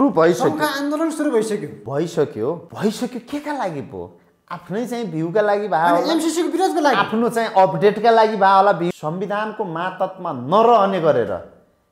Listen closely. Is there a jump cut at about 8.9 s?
yes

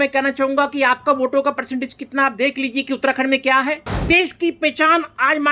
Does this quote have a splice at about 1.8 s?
no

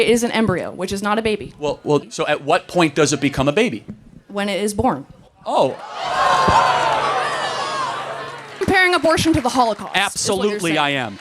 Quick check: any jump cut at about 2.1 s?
yes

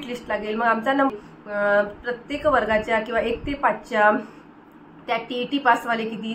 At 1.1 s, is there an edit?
yes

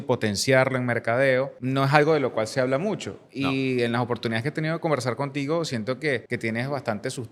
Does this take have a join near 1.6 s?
yes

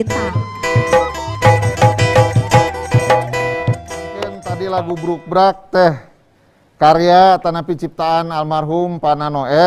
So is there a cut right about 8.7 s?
no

